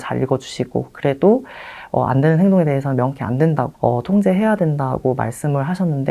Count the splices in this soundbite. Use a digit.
1